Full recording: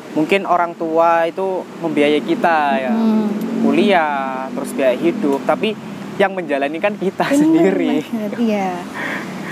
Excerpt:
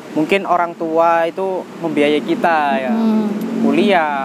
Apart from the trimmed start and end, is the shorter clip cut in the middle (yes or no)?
no